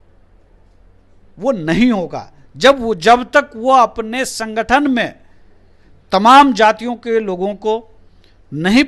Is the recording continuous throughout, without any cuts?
yes; 0 cuts

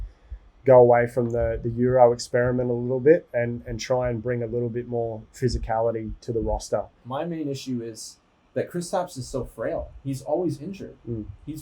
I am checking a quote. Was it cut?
yes; 1 cut; at 7.0 s

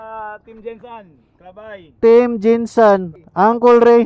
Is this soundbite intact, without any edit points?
no; 1 cut; at 3.2 s

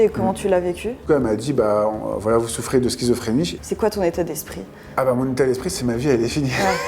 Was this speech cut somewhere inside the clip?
yes; 2 cuts; at 1.1 s, 3.5 s

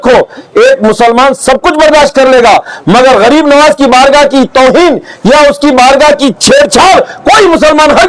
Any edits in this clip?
no; 0 cuts

